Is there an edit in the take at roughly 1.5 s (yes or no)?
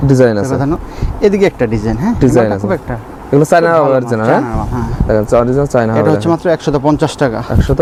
no